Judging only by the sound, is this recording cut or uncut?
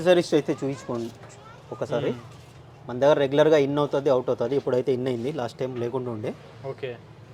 uncut